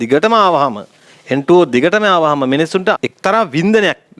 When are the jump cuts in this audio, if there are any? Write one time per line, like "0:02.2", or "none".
0:03.1